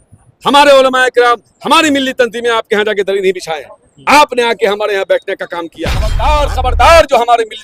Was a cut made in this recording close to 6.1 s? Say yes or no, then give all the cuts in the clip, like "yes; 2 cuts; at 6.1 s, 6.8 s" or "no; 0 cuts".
yes; 1 cut; at 6.1 s